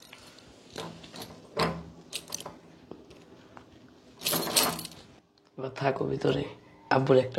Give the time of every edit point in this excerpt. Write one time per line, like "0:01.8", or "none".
none